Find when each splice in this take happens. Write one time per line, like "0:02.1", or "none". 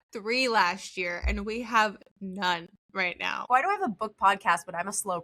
0:03.5